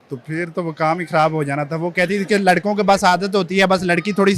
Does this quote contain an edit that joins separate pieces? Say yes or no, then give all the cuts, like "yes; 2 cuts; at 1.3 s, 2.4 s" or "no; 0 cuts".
no; 0 cuts